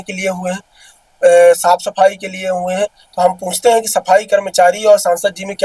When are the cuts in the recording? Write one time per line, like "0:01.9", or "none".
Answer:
none

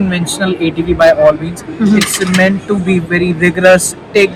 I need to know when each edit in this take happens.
none

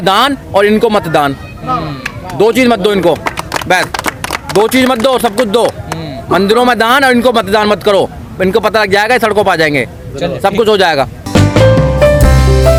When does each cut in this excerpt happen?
none

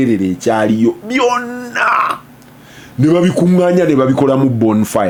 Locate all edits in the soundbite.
none

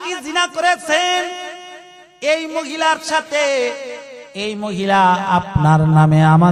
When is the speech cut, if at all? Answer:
none

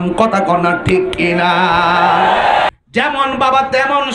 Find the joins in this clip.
0:02.7

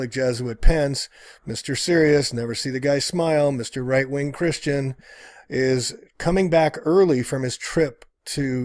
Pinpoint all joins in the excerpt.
0:05.9

